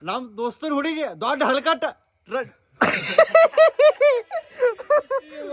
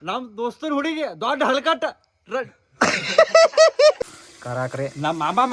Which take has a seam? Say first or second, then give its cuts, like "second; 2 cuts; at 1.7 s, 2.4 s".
second; 1 cut; at 4.0 s